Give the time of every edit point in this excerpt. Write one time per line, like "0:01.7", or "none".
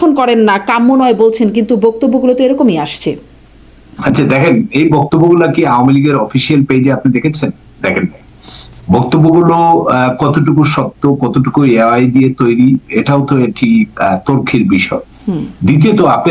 none